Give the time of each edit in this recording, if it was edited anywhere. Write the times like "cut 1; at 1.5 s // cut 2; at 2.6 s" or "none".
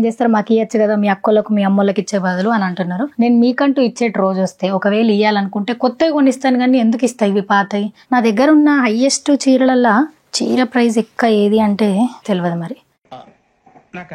cut 1; at 3.1 s // cut 2; at 7.9 s